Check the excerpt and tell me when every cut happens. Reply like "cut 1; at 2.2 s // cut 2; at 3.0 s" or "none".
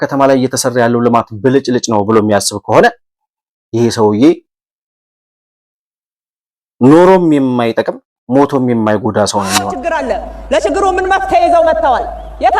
cut 1; at 9.7 s

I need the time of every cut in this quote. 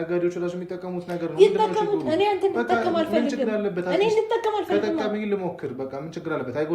none

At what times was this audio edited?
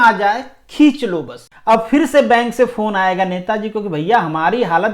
cut 1; at 1.5 s

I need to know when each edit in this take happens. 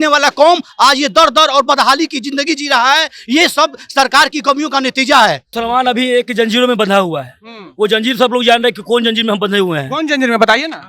cut 1; at 5.5 s

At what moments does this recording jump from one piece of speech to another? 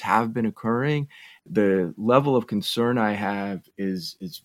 cut 1; at 1.5 s

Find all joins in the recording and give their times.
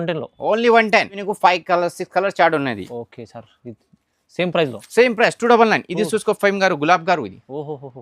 cut 1; at 1.2 s

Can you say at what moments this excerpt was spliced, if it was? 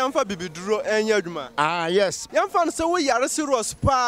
none

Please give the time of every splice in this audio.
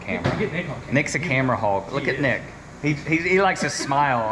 none

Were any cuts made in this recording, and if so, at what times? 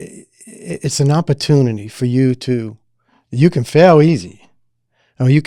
none

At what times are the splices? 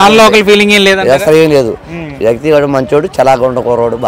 none

